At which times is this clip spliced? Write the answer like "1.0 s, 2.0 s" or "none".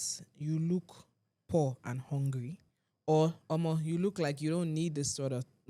none